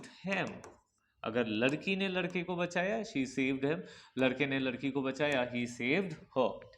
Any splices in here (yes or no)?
no